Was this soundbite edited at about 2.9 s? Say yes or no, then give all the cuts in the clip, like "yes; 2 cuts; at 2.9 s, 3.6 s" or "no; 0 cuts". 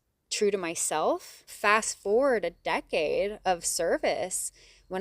no; 1 cut; at 1.5 s